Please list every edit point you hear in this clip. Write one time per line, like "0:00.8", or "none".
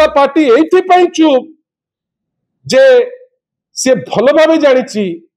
none